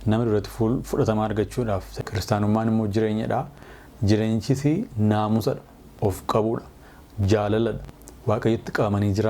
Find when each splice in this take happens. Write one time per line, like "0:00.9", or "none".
0:01.9